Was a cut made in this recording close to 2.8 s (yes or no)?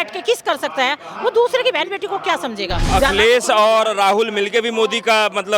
yes